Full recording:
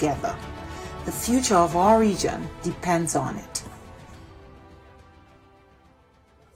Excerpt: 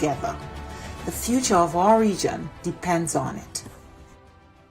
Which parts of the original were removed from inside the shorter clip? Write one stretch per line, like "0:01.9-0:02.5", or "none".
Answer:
0:03.4-0:04.1